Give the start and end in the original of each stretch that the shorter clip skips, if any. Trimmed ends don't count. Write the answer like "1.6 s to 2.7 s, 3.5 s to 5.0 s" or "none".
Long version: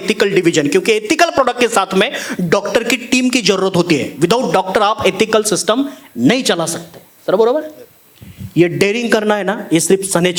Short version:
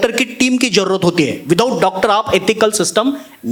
none

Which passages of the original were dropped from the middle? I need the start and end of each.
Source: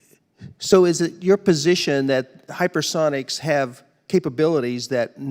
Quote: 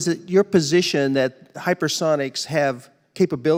none

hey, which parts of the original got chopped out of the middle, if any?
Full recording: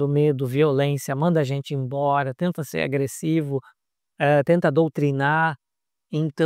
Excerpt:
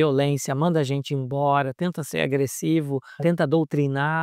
3.8 s to 4.4 s

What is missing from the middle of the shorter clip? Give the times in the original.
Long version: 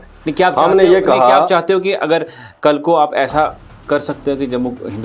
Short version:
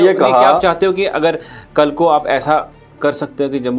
none

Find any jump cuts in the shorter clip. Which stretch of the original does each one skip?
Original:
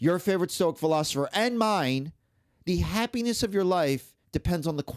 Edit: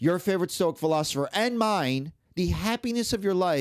2.2 s to 2.5 s

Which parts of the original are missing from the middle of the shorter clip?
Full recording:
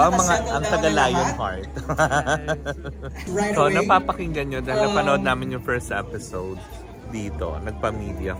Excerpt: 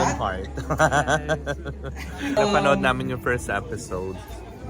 3.2 s to 4.4 s

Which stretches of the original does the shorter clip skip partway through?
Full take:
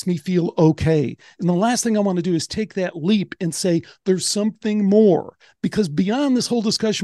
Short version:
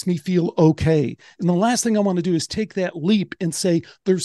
none

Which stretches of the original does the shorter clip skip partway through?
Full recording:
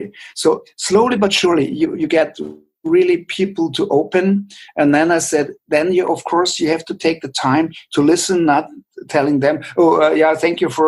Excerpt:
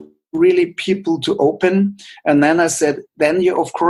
none

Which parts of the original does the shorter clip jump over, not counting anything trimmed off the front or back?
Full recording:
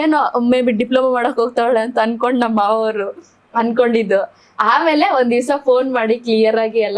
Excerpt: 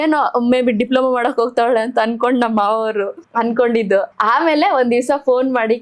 3.2 s to 3.4 s, 4.3 s to 4.5 s

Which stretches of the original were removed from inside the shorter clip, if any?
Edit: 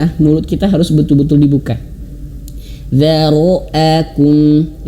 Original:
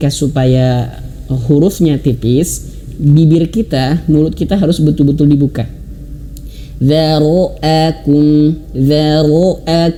none

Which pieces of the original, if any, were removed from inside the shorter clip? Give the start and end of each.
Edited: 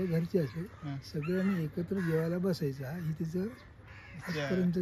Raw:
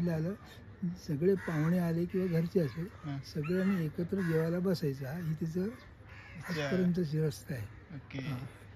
none

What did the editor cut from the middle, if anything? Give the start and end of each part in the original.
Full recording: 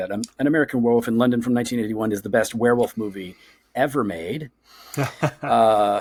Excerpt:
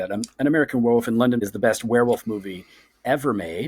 1.4 s to 2.1 s

